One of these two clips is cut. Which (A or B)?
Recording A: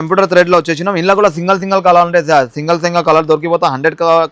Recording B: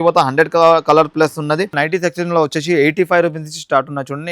B